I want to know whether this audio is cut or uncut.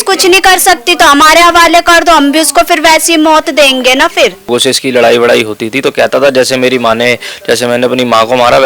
cut